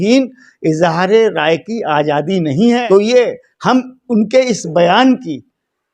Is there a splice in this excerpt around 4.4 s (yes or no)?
no